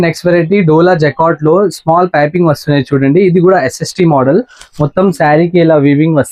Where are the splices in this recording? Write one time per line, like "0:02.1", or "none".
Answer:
none